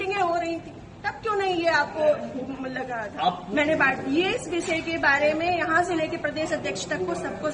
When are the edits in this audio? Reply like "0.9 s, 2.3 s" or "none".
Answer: 3.4 s

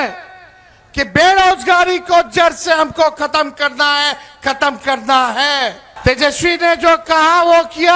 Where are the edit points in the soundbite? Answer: 5.9 s

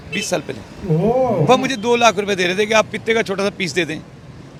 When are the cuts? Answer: none

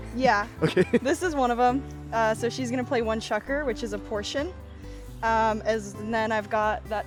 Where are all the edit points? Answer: none

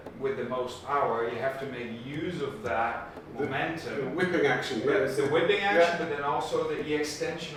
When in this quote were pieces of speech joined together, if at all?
none

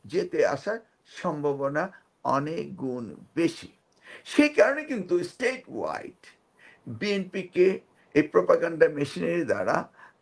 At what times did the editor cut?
none

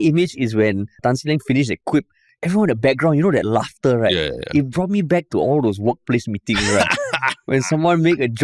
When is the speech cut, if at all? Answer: 1.0 s

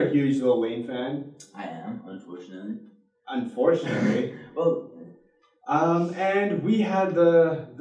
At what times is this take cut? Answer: 6.6 s

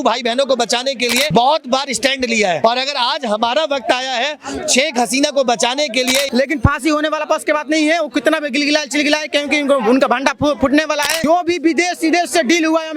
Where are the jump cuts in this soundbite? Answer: 1.3 s, 2.6 s, 6.3 s, 11.1 s

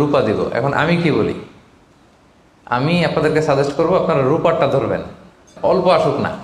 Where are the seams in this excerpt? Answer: 5.5 s

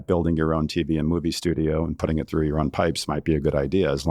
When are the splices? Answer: none

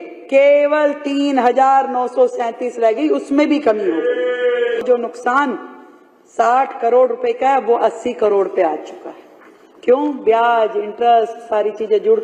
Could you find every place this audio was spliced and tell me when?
4.8 s

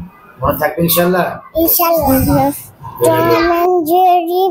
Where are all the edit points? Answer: 2.1 s

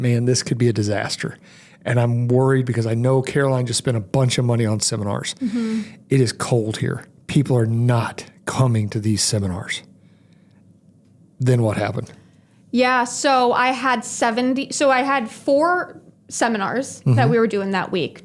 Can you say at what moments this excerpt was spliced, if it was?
none

